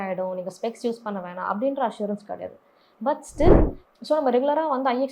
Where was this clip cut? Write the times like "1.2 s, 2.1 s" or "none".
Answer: 3.8 s